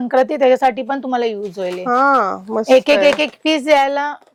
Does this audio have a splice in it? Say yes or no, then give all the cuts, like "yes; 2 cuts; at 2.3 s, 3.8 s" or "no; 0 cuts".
no; 0 cuts